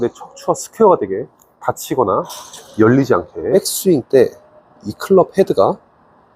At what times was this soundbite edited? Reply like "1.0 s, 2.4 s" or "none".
3.5 s